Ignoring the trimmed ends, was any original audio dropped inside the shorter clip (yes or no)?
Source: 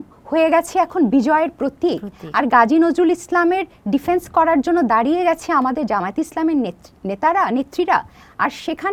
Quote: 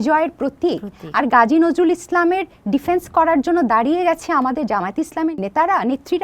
yes